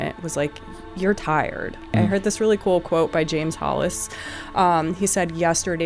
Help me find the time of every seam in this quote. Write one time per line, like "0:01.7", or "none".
0:01.9